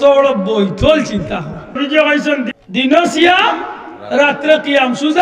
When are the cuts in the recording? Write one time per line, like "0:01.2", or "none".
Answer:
0:01.8
0:02.5